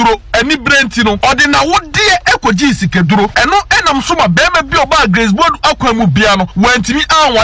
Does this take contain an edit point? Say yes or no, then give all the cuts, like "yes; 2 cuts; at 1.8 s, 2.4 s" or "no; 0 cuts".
yes; 3 cuts; at 1.2 s, 3.3 s, 6.5 s